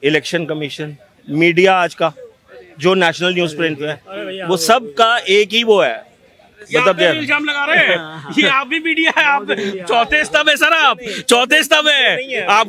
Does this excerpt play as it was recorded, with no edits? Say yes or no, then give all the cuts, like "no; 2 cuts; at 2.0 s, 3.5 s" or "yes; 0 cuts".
yes; 0 cuts